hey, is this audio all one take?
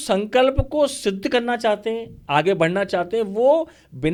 yes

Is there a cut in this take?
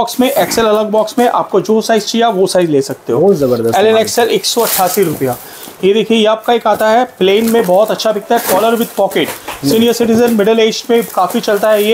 no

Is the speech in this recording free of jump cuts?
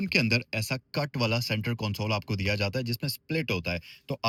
yes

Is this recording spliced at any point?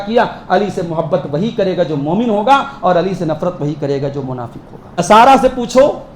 yes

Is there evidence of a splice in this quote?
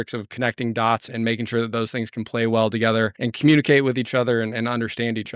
yes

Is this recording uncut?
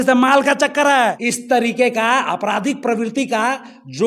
no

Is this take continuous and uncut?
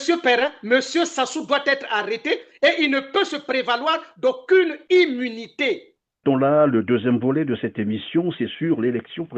no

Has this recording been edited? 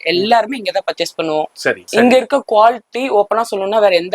yes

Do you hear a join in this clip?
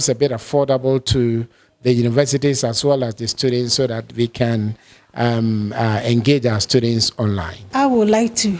yes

